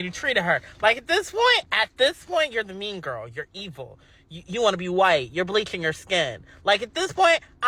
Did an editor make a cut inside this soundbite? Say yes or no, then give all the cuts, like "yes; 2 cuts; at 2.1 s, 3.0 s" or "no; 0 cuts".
no; 0 cuts